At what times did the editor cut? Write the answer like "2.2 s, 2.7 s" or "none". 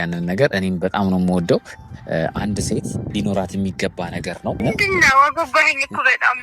4.6 s